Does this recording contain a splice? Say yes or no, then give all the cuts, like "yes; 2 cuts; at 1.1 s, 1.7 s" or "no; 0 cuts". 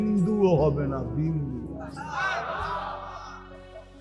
no; 0 cuts